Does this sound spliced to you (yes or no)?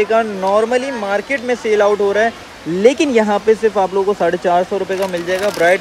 no